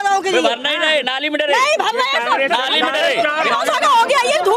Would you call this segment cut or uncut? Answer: cut